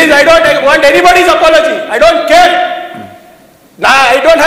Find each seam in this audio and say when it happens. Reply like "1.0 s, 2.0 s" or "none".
none